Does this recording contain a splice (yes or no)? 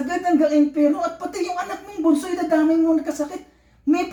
no